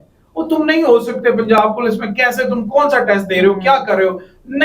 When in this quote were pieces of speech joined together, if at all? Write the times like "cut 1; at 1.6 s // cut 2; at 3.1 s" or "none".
none